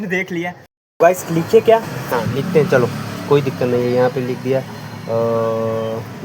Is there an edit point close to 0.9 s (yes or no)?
yes